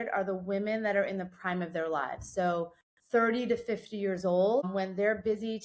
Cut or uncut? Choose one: cut